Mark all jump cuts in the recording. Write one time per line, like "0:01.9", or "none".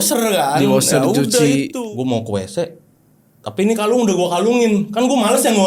0:01.8